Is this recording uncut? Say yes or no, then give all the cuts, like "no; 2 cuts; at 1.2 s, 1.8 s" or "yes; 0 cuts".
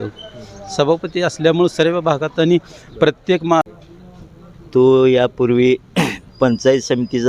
no; 1 cut; at 3.6 s